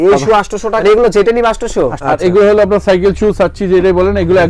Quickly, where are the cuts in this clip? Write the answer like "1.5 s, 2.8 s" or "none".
0.8 s, 2.0 s